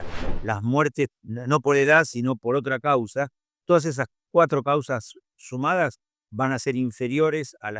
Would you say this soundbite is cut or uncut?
cut